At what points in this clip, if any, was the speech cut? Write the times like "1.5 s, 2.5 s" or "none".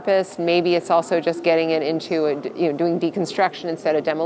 none